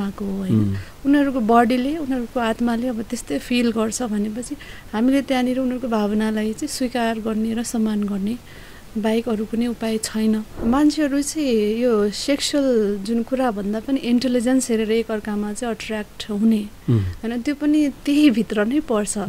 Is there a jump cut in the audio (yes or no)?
yes